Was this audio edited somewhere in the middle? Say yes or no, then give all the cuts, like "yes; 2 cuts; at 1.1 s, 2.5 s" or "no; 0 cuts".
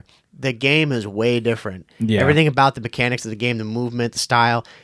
no; 0 cuts